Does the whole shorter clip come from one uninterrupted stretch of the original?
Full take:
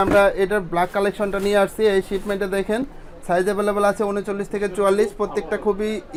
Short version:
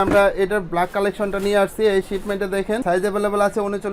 no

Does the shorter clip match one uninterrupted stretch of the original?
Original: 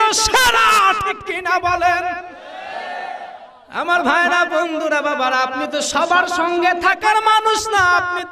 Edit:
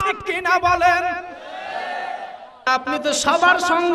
no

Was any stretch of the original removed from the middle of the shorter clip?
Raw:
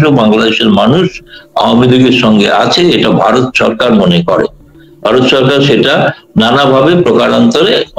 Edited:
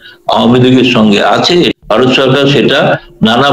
yes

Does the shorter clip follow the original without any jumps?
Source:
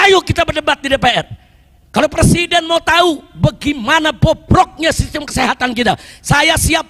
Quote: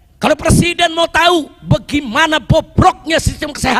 yes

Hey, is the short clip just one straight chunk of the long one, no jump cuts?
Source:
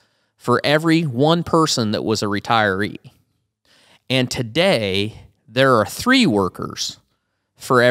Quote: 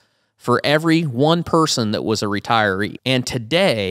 no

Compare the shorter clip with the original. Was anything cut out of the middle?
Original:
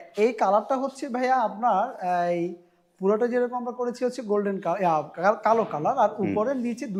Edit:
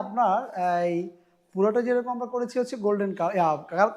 no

